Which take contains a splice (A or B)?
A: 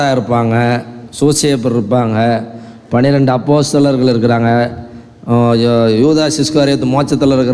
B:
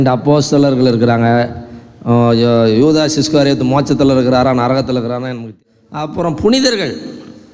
B